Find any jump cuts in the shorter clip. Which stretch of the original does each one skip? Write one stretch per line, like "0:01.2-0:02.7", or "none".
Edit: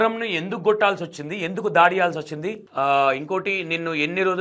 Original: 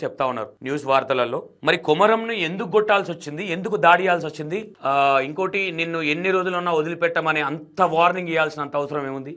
none